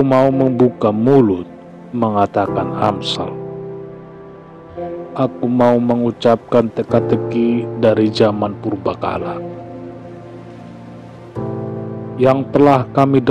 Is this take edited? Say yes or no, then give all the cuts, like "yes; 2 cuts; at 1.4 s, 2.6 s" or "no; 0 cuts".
yes; 2 cuts; at 9.2 s, 11.9 s